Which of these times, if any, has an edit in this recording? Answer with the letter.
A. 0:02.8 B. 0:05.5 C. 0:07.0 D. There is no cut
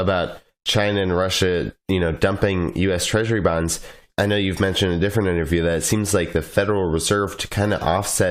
A